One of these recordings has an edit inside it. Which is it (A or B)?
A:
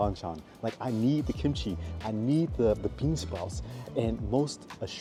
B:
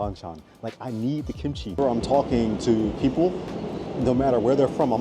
B